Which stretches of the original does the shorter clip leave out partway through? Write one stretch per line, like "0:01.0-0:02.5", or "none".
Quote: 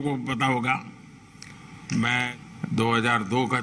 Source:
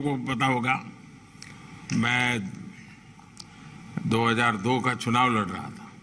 0:02.3-0:03.6